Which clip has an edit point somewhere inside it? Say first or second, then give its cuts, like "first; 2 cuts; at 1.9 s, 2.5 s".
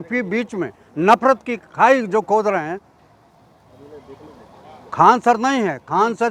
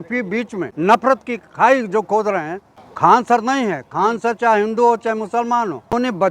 second; 3 cuts; at 1.0 s, 3.2 s, 5.3 s